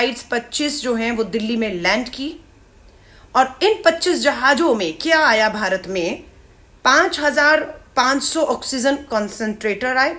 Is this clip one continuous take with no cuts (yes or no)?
yes